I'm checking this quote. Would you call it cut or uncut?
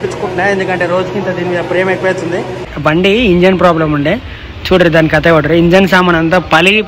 cut